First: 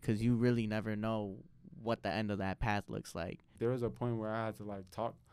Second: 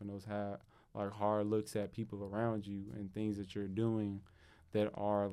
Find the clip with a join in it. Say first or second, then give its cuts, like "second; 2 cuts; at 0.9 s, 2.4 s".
first; 1 cut; at 3.5 s